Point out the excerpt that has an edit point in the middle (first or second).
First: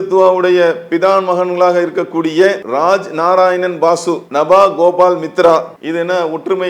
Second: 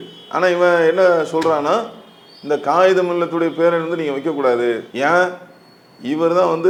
first